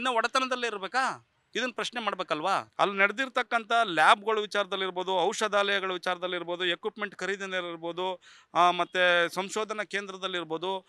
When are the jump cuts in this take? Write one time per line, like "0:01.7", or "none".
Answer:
0:01.3
0:02.7